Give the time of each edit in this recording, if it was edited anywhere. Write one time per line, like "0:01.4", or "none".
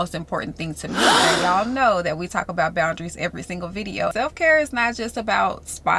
0:01.2
0:04.1

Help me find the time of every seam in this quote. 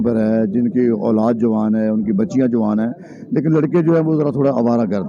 none

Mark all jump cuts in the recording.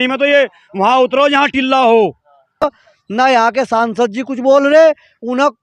0:02.6

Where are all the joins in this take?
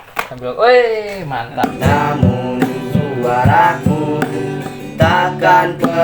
0:01.7

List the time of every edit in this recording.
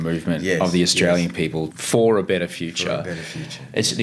0:01.6

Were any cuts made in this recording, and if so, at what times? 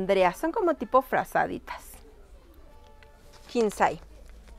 none

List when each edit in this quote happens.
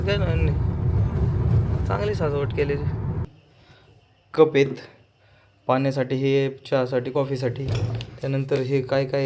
0:03.3

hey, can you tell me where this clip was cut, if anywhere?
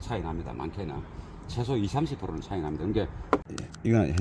0:03.2

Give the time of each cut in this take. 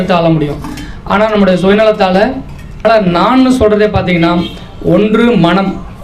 0:02.8

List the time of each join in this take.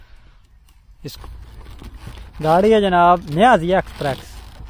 0:01.2

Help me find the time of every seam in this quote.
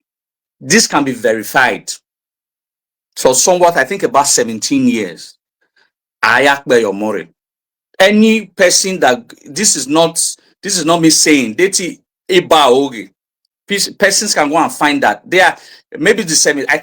none

